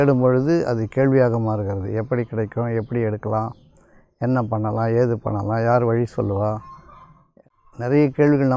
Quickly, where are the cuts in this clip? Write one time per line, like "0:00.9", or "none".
0:07.3